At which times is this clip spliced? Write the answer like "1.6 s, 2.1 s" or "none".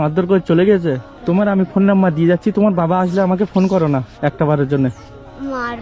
1.1 s